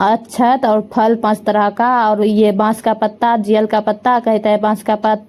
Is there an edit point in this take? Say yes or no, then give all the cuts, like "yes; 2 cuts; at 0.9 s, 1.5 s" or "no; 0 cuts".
no; 0 cuts